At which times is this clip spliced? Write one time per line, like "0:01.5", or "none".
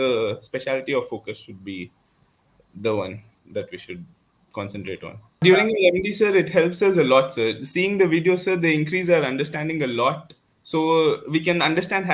0:05.4